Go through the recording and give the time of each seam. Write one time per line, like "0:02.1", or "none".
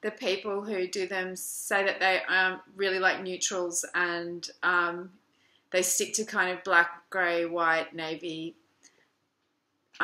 0:06.8